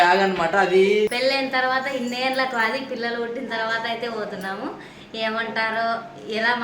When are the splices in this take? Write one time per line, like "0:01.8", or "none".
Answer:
0:01.1

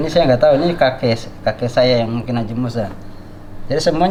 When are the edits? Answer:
none

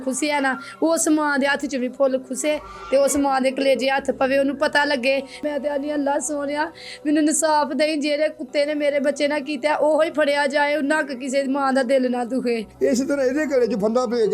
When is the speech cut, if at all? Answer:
0:05.4
0:12.7

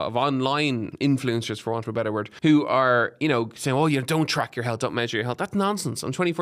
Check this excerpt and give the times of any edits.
0:00.9
0:02.3

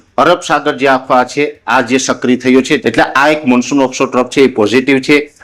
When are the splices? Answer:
0:02.8

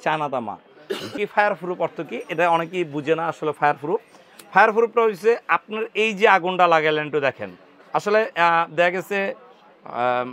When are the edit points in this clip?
0:01.2

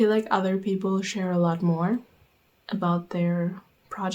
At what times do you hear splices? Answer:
none

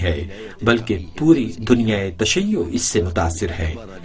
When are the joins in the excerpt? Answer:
0:01.5

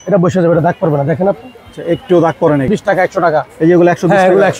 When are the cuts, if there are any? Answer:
0:02.7

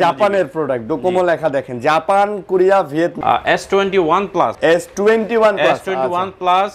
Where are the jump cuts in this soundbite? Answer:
0:03.2
0:04.5

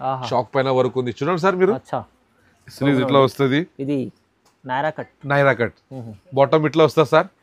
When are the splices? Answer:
none

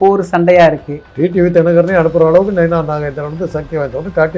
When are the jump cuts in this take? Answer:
0:00.9

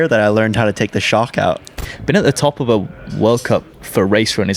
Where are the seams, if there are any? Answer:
0:01.8

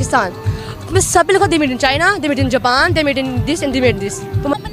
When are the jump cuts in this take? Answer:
none

